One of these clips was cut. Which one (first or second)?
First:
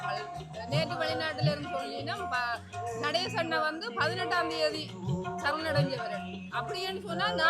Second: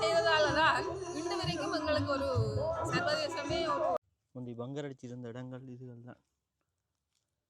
second